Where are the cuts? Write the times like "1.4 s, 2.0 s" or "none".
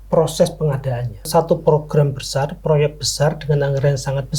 1.3 s

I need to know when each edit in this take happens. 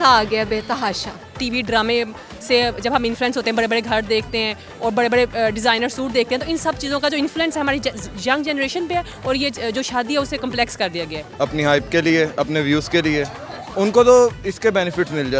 1.4 s, 11.2 s

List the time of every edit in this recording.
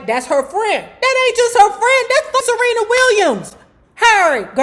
2.4 s

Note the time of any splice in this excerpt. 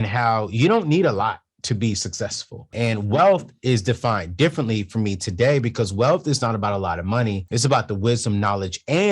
2.7 s, 7.4 s

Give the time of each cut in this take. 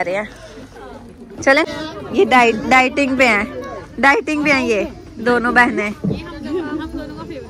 1.7 s

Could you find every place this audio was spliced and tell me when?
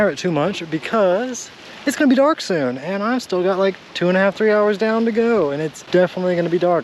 5.7 s

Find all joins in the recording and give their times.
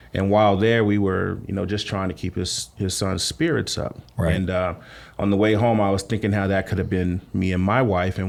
none

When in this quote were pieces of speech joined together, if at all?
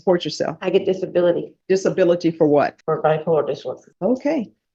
1.5 s, 2.8 s, 3.9 s

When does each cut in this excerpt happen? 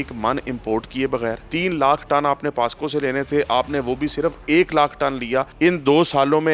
1.4 s, 5.5 s

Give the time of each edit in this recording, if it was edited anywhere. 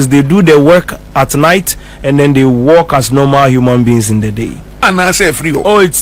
4.8 s

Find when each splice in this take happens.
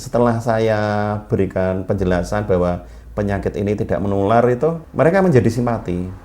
4.8 s

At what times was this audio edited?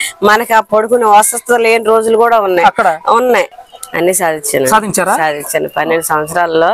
3.5 s

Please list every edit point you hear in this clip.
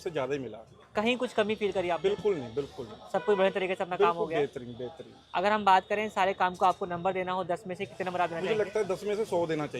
none

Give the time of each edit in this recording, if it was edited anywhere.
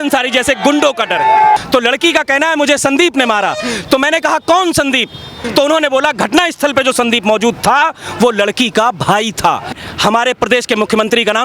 1.6 s, 5.4 s, 9.8 s

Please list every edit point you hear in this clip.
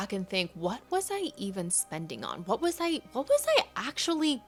none

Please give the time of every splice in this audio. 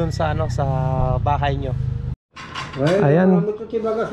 2.6 s

